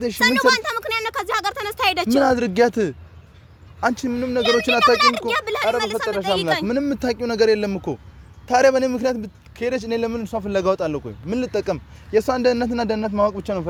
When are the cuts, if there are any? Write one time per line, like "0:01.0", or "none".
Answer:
none